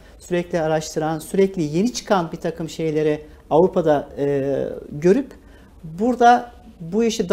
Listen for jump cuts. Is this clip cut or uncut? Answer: uncut